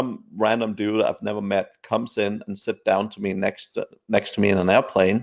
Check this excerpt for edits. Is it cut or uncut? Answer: uncut